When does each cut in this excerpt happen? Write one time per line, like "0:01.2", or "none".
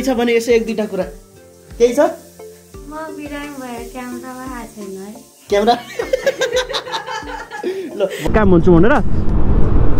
0:08.2